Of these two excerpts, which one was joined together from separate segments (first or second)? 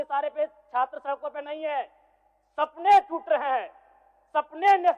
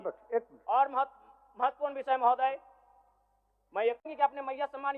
second